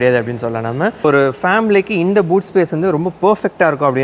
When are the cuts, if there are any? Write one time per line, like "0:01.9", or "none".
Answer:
0:01.0